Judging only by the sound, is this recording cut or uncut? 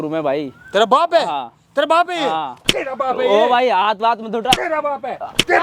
uncut